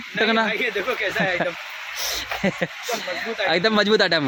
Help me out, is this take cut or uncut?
uncut